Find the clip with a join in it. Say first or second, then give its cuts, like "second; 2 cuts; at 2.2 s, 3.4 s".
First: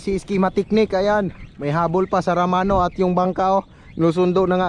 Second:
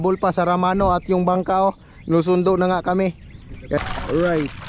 second; 1 cut; at 3.8 s